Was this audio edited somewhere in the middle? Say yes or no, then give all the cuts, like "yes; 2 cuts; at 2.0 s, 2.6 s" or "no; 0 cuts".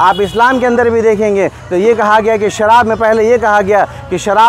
no; 0 cuts